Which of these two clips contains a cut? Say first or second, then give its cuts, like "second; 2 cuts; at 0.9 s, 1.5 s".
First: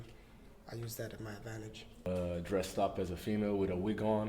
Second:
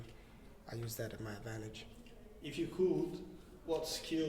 first; 1 cut; at 2.1 s